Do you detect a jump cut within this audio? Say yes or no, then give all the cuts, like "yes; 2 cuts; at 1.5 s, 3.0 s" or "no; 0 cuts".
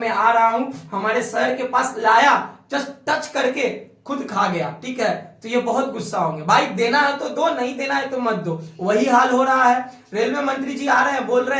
no; 0 cuts